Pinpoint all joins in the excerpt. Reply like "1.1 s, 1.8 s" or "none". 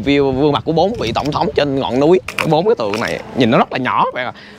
2.3 s